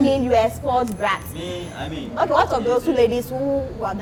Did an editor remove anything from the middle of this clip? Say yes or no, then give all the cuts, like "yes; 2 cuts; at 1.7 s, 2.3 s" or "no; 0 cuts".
no; 0 cuts